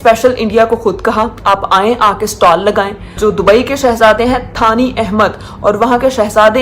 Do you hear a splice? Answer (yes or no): yes